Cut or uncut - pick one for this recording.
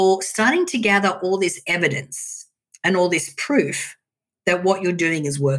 uncut